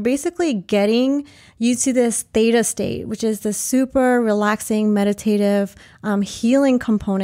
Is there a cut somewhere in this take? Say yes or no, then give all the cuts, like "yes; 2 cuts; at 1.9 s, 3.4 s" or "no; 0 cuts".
no; 0 cuts